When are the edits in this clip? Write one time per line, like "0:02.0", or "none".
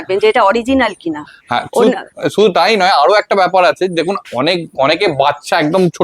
none